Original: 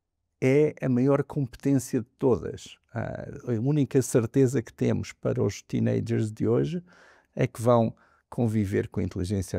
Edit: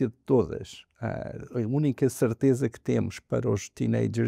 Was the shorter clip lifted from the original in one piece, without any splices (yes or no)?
yes